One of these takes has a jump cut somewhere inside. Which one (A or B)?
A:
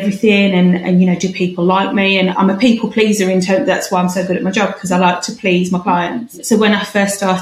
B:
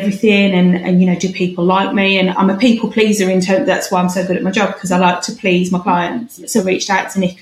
B